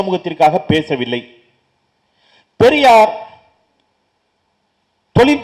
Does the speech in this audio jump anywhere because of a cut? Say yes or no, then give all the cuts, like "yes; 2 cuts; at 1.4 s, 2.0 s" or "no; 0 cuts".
no; 0 cuts